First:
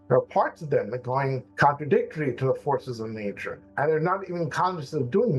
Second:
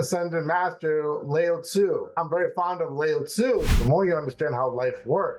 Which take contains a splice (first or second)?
second